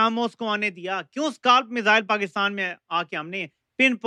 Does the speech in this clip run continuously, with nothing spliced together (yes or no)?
yes